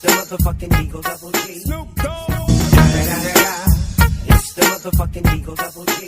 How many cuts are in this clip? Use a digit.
2